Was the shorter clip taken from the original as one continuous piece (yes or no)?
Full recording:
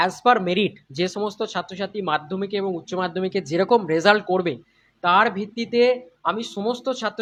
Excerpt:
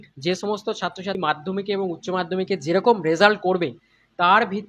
no